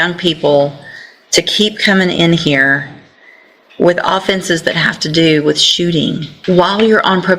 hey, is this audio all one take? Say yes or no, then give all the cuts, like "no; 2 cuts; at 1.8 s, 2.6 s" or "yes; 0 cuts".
no; 1 cut; at 6.3 s